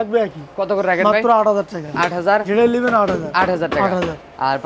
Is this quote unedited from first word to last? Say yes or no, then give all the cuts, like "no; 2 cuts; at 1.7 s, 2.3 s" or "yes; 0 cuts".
yes; 0 cuts